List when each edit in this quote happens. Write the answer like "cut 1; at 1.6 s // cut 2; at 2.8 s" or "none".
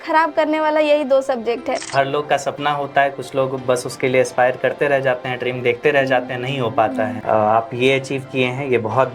cut 1; at 1.8 s // cut 2; at 7.2 s